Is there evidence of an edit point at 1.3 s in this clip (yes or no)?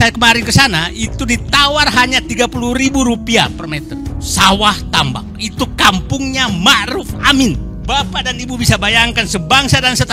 no